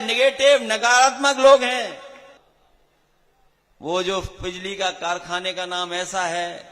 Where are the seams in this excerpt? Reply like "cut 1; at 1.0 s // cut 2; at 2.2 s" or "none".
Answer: cut 1; at 2.4 s